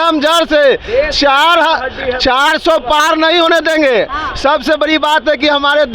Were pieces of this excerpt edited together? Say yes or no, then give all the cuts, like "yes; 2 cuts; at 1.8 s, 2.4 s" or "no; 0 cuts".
no; 0 cuts